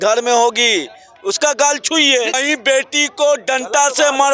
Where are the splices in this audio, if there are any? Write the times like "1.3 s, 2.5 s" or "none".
2.4 s